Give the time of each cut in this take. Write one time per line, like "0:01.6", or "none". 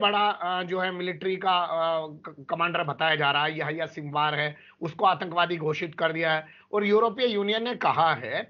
none